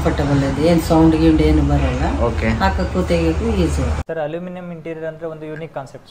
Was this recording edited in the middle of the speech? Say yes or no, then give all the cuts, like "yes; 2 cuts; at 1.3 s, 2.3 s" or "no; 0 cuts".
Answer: yes; 1 cut; at 4.0 s